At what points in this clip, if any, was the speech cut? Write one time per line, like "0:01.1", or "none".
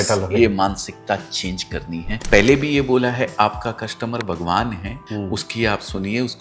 0:02.2
0:04.9